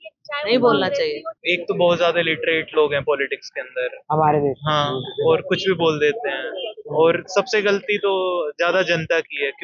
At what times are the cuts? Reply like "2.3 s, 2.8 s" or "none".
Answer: 1.3 s